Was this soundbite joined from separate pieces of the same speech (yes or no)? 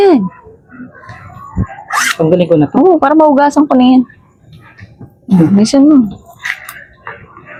no